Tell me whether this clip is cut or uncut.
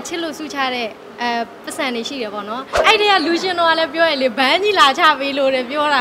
cut